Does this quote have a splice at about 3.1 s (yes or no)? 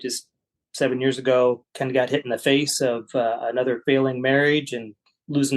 no